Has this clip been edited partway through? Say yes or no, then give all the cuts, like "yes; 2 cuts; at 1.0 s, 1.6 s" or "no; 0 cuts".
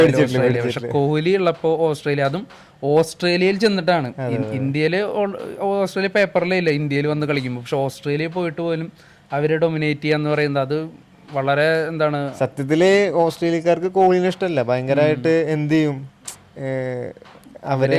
no; 0 cuts